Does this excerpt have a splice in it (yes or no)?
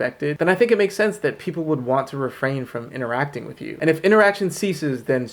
yes